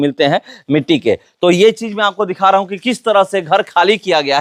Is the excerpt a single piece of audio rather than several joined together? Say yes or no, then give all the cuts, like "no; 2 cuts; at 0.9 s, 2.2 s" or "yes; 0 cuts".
yes; 0 cuts